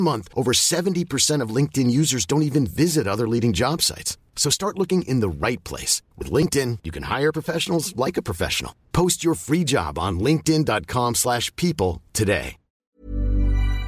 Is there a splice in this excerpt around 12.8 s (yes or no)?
yes